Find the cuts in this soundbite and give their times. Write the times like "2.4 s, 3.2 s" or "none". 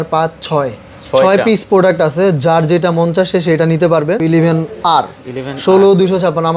4.2 s